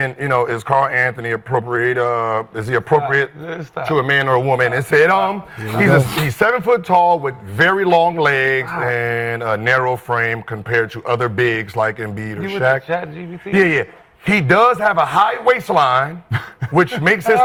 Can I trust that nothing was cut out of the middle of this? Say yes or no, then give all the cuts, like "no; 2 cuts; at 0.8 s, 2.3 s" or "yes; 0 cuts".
yes; 0 cuts